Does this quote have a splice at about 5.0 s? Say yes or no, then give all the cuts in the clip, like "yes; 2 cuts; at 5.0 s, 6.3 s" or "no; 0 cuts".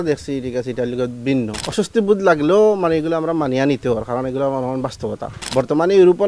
no; 1 cut; at 1.6 s